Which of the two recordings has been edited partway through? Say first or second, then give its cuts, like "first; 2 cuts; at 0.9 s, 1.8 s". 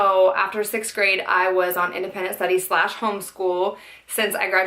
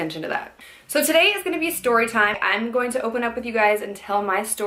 first; 1 cut; at 1.9 s